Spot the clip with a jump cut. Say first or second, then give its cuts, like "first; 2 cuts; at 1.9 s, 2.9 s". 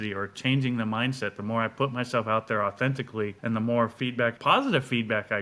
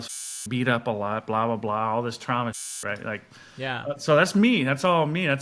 first; 2 cuts; at 3.4 s, 4.4 s